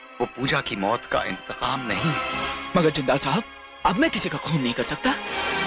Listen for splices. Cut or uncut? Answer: uncut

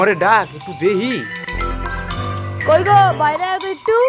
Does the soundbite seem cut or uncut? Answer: uncut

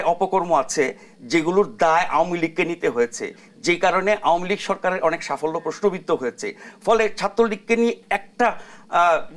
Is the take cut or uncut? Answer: uncut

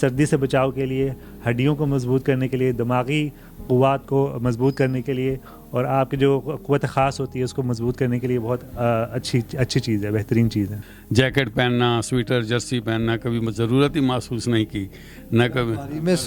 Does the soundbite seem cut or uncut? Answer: cut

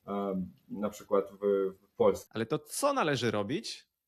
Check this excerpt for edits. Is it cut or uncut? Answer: cut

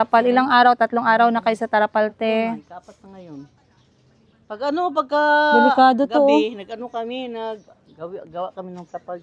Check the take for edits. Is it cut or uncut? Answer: uncut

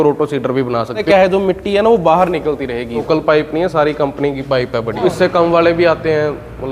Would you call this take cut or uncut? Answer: cut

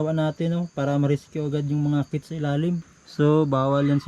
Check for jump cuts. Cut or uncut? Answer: cut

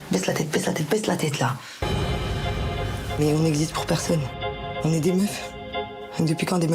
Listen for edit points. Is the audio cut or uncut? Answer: cut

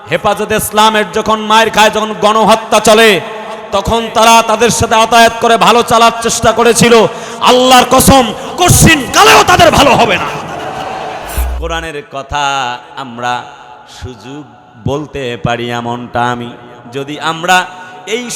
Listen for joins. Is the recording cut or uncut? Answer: cut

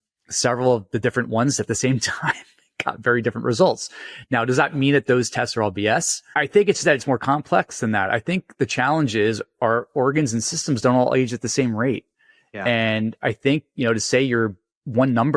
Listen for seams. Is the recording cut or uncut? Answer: uncut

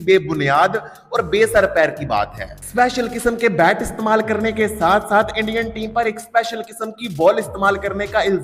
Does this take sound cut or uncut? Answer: uncut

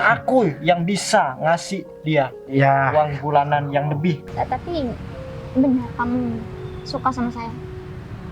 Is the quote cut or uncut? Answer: cut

